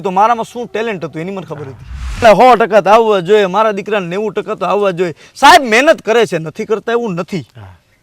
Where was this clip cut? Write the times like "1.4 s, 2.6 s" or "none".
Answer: 2.2 s